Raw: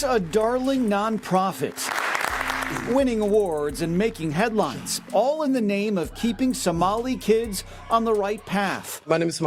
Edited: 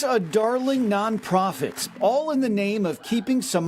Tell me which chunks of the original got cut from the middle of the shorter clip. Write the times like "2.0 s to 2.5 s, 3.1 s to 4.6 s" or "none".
1.8 s to 5.0 s